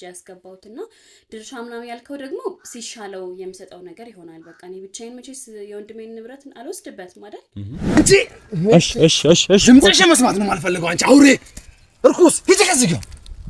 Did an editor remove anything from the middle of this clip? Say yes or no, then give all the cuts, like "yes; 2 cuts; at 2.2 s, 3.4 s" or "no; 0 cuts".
yes; 1 cut; at 8.0 s